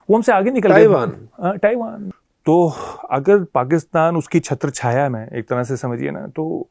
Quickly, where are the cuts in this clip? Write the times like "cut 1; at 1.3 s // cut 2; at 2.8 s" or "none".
cut 1; at 2.1 s